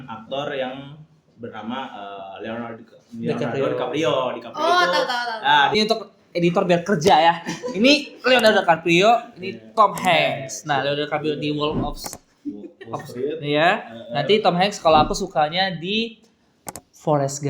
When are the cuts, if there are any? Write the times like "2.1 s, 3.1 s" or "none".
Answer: 5.7 s